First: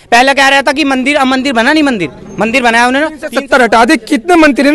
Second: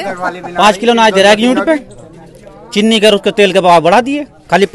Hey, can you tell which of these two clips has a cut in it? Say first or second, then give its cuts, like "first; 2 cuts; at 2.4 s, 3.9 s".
first; 1 cut; at 3.2 s